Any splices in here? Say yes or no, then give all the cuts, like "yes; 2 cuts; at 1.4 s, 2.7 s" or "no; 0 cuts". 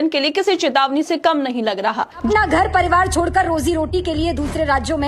yes; 1 cut; at 2.2 s